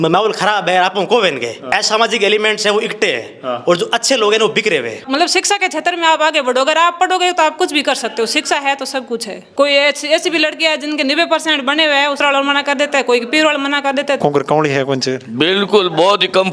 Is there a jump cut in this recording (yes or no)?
yes